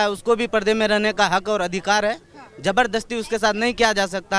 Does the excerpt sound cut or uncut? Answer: uncut